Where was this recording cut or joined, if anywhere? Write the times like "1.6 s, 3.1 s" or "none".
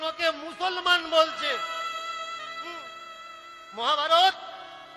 none

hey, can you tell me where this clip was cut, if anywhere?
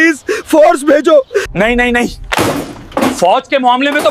1.5 s

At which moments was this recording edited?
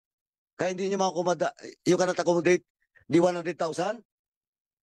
none

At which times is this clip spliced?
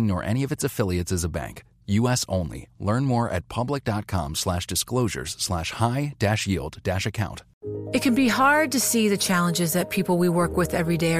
7.5 s

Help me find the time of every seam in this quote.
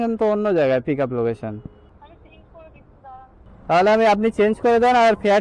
3.4 s

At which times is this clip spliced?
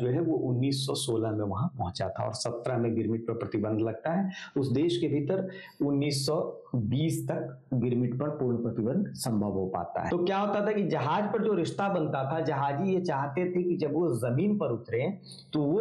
10.1 s

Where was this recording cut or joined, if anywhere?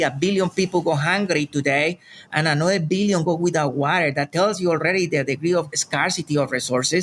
none

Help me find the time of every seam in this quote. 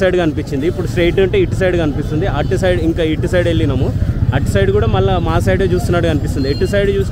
none

